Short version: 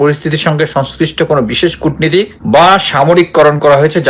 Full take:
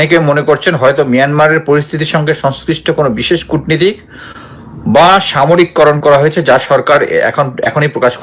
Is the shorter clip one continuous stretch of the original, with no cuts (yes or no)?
no